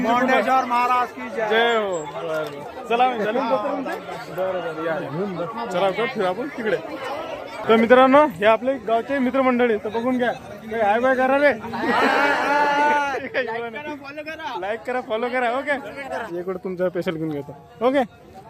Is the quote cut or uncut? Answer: cut